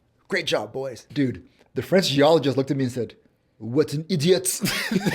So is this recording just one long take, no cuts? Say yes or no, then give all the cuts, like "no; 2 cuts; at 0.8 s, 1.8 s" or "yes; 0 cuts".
no; 1 cut; at 1.1 s